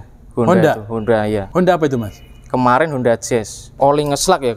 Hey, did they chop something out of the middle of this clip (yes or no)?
yes